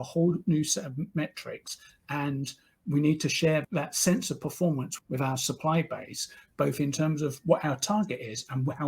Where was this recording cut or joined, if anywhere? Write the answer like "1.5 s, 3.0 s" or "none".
4.9 s